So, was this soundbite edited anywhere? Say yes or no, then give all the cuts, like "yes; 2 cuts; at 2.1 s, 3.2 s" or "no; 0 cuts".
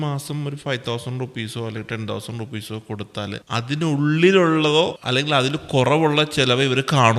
yes; 2 cuts; at 3.4 s, 5.0 s